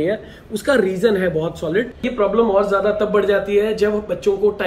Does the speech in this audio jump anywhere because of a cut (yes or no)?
yes